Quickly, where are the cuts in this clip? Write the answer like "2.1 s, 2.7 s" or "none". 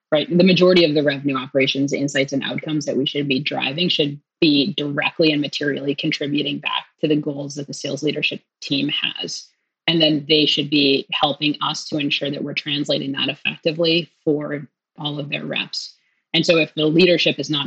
4.3 s, 14.9 s, 16.7 s